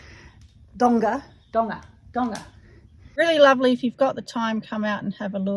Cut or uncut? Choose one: cut